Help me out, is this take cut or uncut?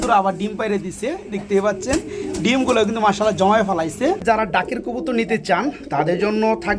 cut